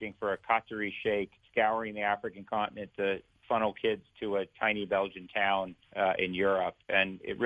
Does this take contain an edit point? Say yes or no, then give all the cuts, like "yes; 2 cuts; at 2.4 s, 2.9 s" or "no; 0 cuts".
yes; 2 cuts; at 1.4 s, 5.8 s